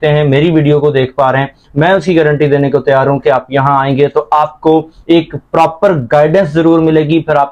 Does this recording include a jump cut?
no; 0 cuts

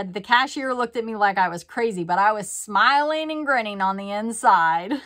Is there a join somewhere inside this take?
no; 0 cuts

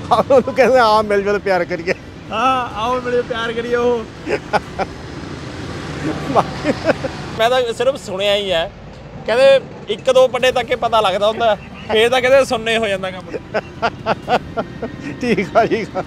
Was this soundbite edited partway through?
yes; 1 cut; at 7.3 s

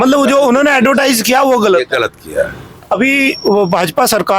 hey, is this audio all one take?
yes; 0 cuts

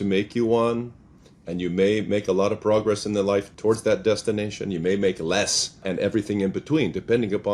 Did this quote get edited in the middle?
yes; 2 cuts; at 3.5 s, 5.8 s

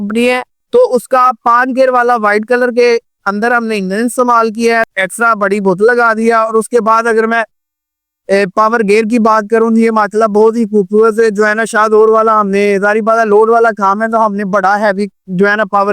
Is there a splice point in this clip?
yes; 1 cut; at 5.0 s

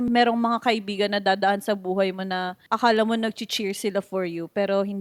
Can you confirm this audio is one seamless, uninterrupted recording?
yes; 0 cuts

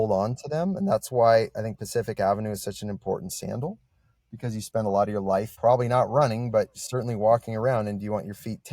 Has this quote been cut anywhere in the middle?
yes; 1 cut; at 5.5 s

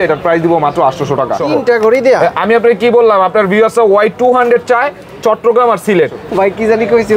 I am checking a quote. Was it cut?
yes; 2 cuts; at 1.4 s, 6.2 s

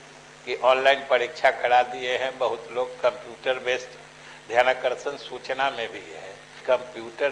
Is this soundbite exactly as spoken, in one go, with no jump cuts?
yes; 0 cuts

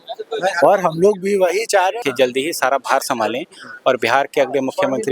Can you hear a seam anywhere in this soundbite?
yes; 1 cut; at 2.0 s

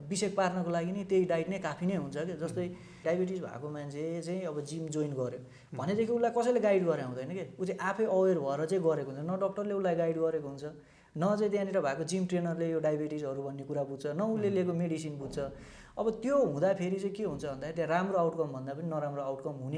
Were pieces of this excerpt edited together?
yes; 1 cut; at 3.0 s

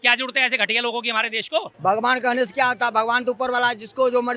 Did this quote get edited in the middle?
yes; 1 cut; at 1.7 s

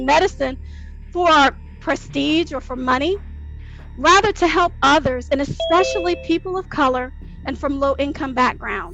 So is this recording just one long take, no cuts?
yes; 0 cuts

